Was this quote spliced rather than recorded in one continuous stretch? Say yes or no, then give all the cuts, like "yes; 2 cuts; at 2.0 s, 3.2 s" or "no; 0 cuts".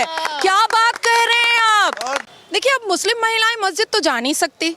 yes; 1 cut; at 2.3 s